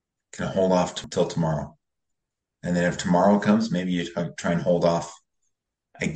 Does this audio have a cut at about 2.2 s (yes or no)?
no